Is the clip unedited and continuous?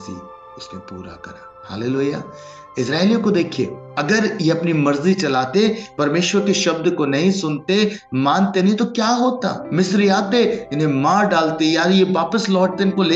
no; 3 cuts; at 1.6 s, 3.9 s, 9.6 s

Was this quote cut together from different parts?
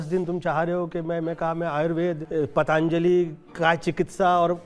yes; 1 cut; at 2.2 s

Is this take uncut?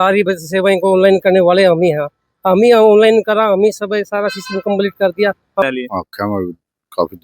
no; 1 cut; at 5.6 s

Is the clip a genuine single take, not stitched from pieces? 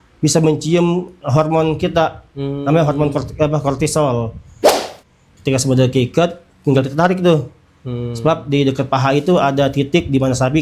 no; 1 cut; at 4.9 s

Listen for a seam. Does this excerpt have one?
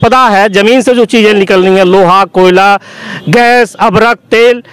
no; 0 cuts

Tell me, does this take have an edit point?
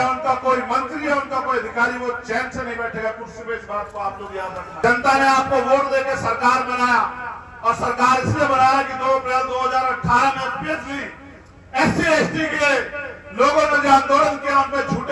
yes; 1 cut; at 4.7 s

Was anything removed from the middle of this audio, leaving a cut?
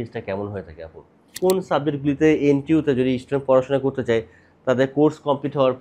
yes; 1 cut; at 1.3 s

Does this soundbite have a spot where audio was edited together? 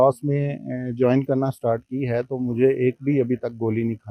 no; 0 cuts

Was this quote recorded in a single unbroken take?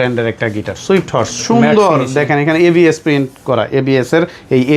yes; 0 cuts

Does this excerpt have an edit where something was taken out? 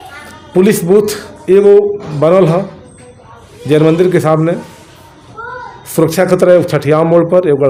no; 0 cuts

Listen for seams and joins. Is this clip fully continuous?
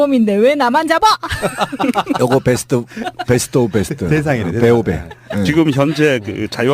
no; 1 cut; at 1.3 s

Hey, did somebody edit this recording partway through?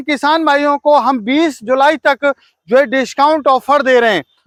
no; 0 cuts

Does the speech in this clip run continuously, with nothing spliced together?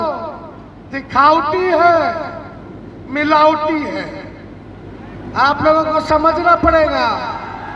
yes; 0 cuts

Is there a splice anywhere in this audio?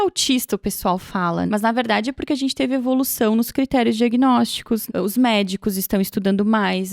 yes; 2 cuts; at 1.5 s, 4.8 s

